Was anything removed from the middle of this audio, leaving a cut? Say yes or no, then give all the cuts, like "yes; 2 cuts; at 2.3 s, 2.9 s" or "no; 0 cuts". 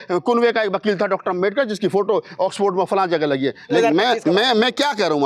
yes; 1 cut; at 3.8 s